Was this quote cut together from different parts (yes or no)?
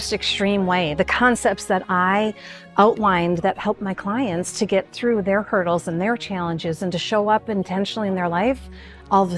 no